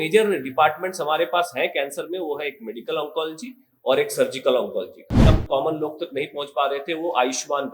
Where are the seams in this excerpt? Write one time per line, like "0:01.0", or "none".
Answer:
0:05.1